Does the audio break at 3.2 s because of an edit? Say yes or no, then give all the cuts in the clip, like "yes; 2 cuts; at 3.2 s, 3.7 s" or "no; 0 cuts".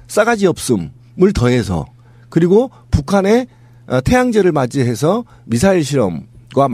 yes; 1 cut; at 3.2 s